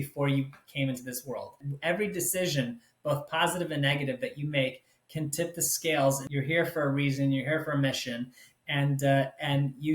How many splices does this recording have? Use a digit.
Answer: 2